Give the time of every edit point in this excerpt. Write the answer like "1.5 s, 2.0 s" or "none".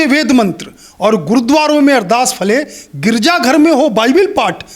none